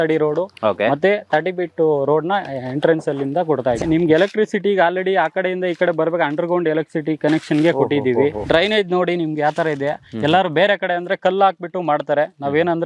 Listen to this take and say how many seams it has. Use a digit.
2